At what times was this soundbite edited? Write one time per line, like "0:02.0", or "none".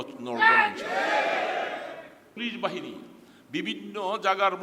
0:02.4